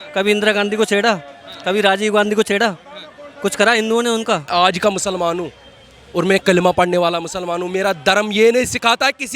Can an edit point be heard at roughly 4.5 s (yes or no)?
yes